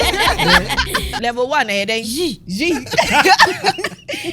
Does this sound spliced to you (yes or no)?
yes